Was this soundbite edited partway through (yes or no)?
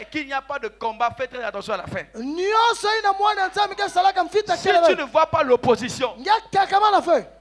no